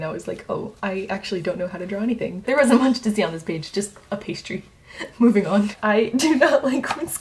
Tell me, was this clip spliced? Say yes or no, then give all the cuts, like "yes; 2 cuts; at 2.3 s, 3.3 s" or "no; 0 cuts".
yes; 2 cuts; at 2.4 s, 5.7 s